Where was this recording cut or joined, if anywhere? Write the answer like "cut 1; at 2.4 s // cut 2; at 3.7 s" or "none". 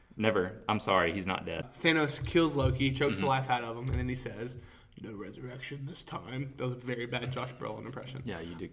cut 1; at 1.6 s